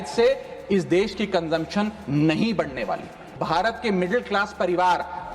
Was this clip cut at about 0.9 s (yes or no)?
no